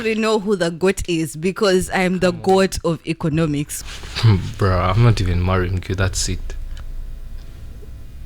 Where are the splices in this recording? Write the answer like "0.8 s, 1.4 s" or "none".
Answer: 3.7 s